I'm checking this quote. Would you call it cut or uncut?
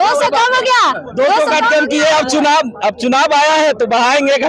uncut